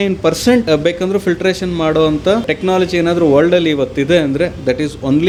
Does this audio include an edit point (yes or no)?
no